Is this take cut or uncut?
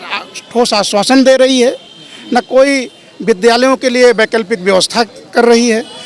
uncut